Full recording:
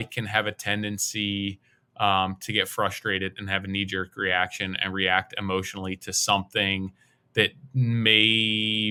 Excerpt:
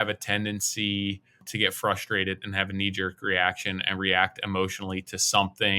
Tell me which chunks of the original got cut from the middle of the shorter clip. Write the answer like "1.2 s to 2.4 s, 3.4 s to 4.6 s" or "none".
1.8 s to 2.4 s